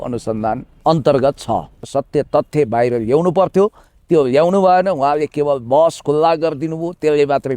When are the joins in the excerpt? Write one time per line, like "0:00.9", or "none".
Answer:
0:01.8